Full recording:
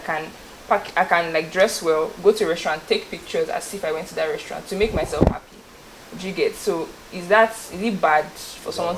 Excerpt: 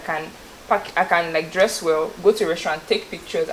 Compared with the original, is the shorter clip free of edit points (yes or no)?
yes